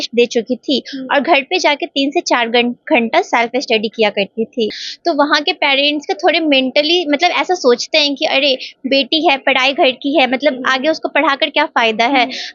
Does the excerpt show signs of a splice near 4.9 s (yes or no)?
yes